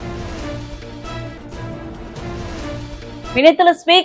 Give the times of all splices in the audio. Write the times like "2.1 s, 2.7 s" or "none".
2.9 s